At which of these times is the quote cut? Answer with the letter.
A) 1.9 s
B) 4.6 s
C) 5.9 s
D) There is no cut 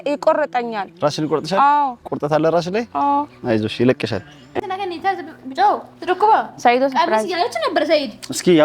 B